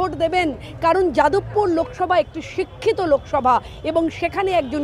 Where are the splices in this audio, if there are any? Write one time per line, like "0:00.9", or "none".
none